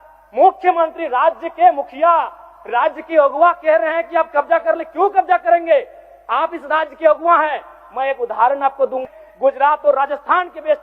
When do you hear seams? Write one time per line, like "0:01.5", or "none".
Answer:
0:09.0